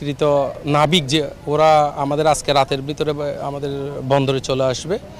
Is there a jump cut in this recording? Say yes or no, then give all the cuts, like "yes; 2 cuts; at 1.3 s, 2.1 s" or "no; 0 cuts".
no; 0 cuts